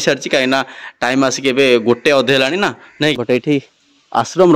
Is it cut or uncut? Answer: cut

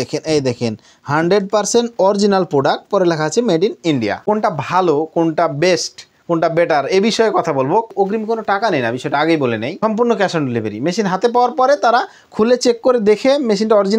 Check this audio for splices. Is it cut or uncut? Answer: cut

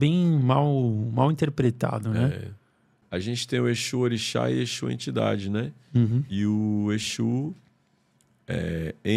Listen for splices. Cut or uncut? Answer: cut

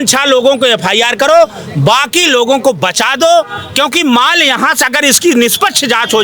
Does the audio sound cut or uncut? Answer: uncut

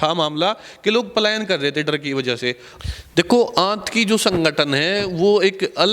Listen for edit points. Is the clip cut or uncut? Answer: cut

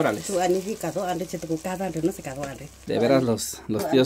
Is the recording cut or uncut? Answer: cut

